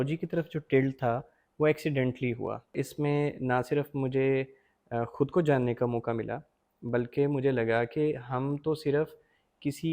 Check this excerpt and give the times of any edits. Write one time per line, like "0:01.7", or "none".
0:02.7